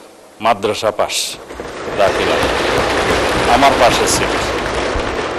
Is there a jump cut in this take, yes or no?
no